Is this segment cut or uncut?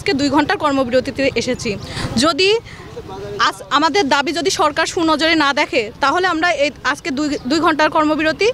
uncut